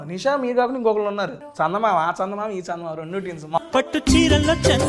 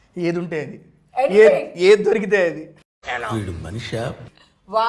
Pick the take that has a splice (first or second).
first